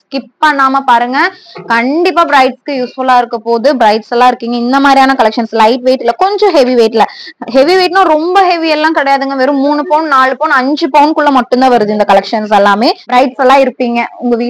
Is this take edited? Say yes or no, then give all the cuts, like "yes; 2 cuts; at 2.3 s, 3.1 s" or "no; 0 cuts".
yes; 1 cut; at 13.0 s